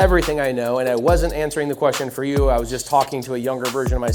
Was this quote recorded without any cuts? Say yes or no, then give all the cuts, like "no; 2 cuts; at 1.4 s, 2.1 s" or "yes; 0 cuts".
yes; 0 cuts